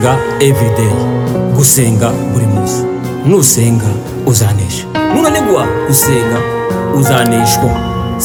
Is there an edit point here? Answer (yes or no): no